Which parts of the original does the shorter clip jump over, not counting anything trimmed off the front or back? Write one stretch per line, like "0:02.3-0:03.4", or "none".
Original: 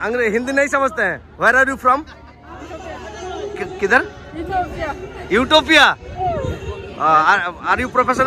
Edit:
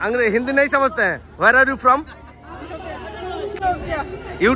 0:03.6-0:04.5